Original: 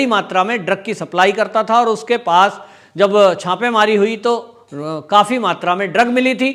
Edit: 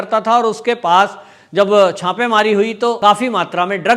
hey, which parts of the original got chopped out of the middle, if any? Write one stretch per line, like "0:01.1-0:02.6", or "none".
0:04.4-0:05.1